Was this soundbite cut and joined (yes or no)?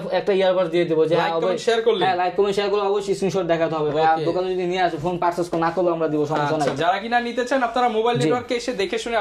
no